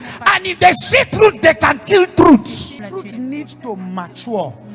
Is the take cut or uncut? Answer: uncut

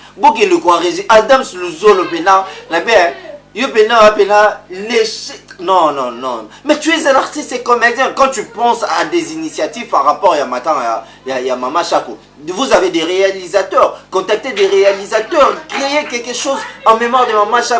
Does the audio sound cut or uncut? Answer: uncut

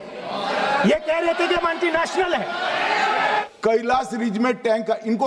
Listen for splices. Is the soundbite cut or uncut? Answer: cut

